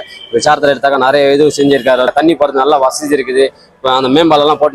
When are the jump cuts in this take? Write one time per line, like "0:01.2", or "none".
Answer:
0:02.1